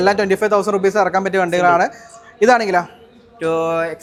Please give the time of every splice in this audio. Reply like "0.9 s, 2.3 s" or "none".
none